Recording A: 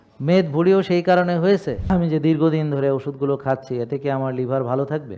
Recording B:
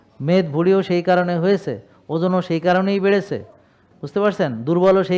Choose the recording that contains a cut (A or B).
A